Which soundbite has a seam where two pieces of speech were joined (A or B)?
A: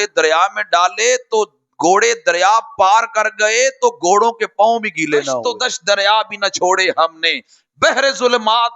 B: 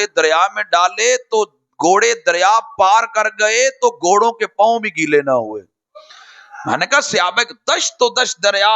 A